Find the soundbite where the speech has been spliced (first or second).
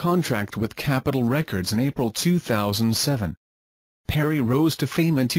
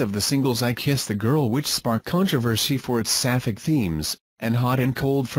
second